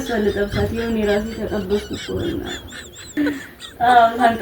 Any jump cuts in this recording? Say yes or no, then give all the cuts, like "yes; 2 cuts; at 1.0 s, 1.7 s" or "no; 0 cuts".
yes; 1 cut; at 3.2 s